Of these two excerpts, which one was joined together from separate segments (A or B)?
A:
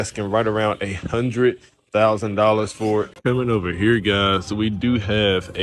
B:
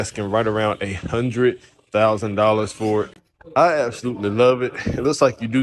A